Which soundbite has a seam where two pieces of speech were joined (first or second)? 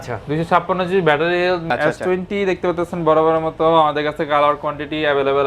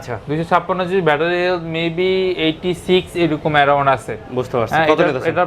first